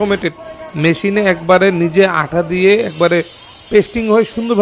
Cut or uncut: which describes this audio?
uncut